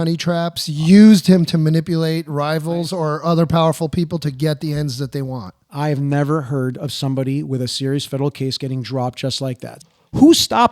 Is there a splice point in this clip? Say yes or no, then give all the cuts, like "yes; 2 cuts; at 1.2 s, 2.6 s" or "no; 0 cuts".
yes; 1 cut; at 9.7 s